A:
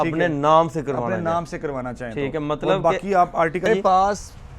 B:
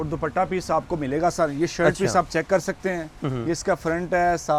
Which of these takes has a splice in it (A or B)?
A